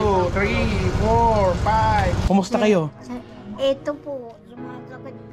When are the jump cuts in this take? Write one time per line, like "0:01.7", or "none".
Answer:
0:02.3